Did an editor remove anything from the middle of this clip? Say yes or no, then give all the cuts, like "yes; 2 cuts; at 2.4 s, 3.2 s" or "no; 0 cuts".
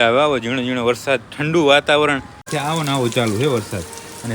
yes; 1 cut; at 2.5 s